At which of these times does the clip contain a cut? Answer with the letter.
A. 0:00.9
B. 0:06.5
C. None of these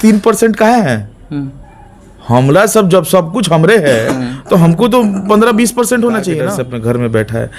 B